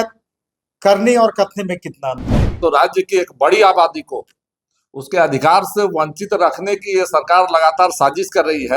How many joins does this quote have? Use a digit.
1